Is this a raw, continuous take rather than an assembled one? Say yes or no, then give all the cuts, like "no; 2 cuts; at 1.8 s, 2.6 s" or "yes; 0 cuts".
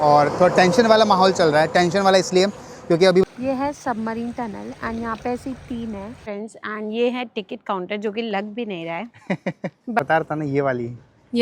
no; 3 cuts; at 3.2 s, 5.9 s, 10.0 s